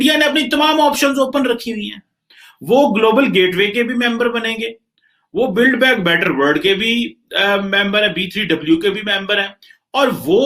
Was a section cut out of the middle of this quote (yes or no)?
no